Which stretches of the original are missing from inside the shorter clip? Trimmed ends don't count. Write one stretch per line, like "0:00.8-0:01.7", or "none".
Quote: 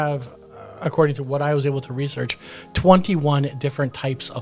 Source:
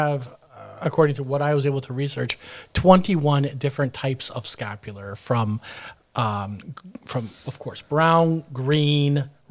none